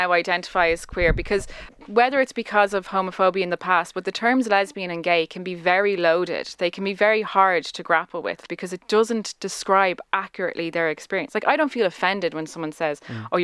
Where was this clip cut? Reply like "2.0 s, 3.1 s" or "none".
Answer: 1.8 s, 8.4 s